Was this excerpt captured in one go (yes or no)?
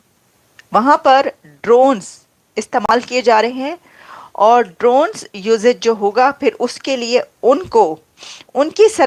yes